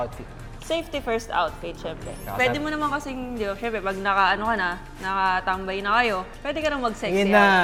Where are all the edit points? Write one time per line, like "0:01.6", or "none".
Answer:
none